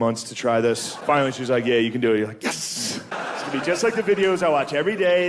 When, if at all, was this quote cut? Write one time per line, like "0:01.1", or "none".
0:00.9
0:03.2